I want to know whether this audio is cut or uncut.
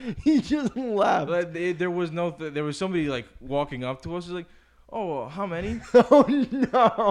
uncut